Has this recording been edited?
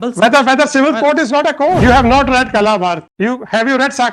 yes; 2 cuts; at 1.8 s, 3.1 s

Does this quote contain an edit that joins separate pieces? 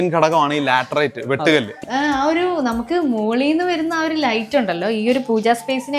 yes; 1 cut; at 1.8 s

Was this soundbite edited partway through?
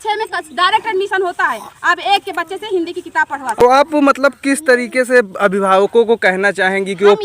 yes; 1 cut; at 3.6 s

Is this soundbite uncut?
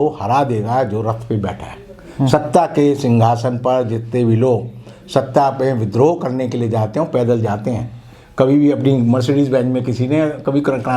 yes; 0 cuts

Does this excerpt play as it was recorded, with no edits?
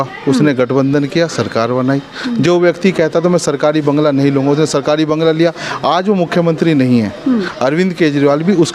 yes; 0 cuts

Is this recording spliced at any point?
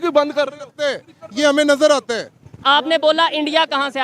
yes; 1 cut; at 2.6 s

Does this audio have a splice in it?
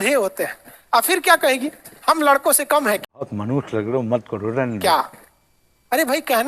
no; 0 cuts

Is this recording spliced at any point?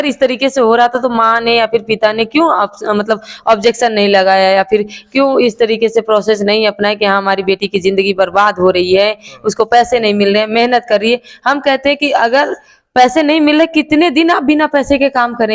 no; 0 cuts

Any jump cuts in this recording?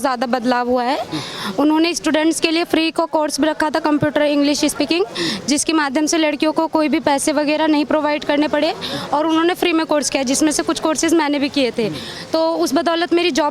no; 0 cuts

